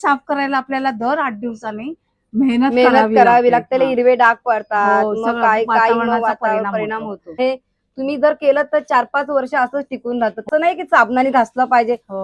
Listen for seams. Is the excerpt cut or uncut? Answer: cut